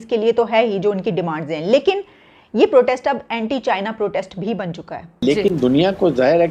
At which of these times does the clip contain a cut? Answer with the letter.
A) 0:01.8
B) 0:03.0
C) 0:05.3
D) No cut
C